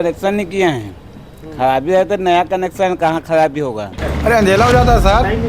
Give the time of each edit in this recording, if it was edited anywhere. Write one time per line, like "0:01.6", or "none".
0:04.0